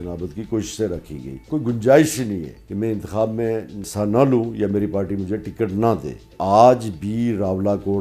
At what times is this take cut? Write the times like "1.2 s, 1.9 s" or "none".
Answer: 1.4 s, 2.6 s, 3.8 s, 6.3 s

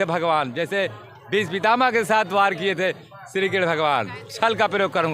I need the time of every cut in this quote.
none

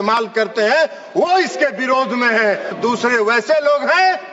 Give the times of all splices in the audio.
2.7 s

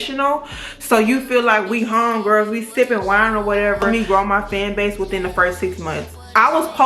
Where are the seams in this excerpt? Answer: 3.8 s

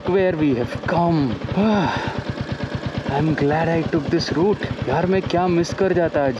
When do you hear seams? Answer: 1.5 s, 4.7 s

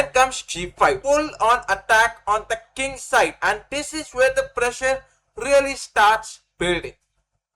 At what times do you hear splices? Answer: 1.0 s

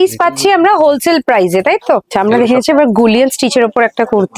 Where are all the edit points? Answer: 2.1 s

